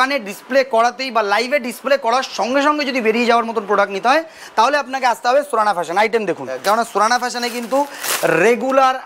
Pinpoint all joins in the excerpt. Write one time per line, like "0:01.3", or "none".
0:06.6